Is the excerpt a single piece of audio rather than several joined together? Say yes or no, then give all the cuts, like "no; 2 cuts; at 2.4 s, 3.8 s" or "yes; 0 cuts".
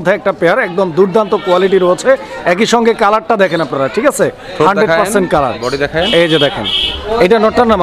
yes; 0 cuts